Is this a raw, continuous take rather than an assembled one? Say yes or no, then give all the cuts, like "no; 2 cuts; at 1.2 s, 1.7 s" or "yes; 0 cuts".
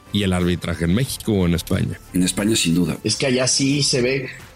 no; 2 cuts; at 2.0 s, 3.0 s